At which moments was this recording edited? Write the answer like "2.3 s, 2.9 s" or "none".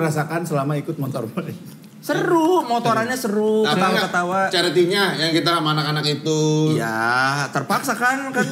none